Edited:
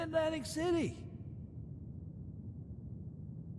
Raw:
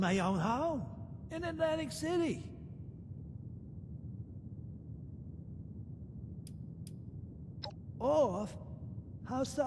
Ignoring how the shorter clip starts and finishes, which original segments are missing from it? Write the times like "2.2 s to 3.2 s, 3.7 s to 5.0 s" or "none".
2.4 s to 4.3 s